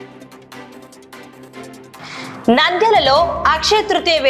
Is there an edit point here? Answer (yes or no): no